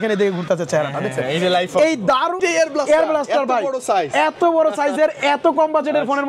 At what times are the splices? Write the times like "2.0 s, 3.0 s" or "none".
2.4 s